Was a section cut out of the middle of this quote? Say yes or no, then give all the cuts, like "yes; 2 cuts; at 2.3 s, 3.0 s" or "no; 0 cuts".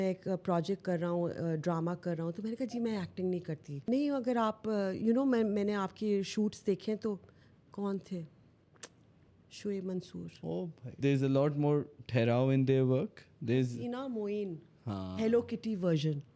yes; 2 cuts; at 3.9 s, 10.9 s